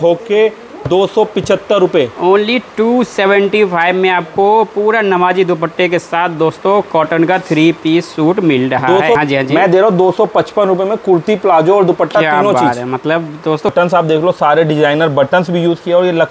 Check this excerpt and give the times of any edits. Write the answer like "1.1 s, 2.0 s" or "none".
9.2 s, 13.7 s